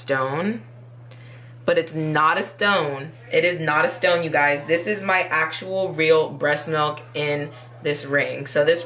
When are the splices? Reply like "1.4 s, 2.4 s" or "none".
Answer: none

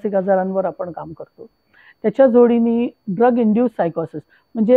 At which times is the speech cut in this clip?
3.0 s

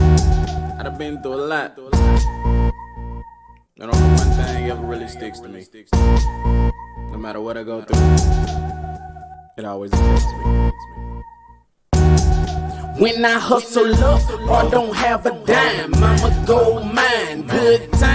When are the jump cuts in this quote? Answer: none

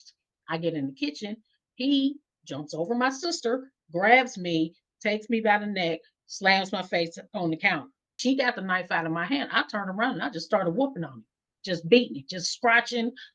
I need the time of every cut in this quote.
8.2 s

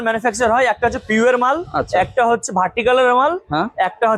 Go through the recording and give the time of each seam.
none

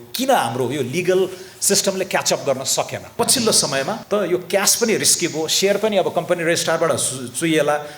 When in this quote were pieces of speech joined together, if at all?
3.1 s, 4.0 s

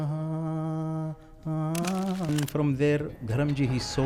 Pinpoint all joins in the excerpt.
2.3 s

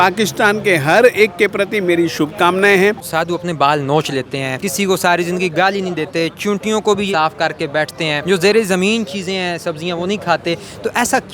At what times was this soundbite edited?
3.1 s, 4.6 s, 7.1 s, 8.2 s

